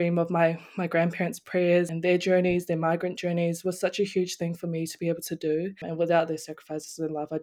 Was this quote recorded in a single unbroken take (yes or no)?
no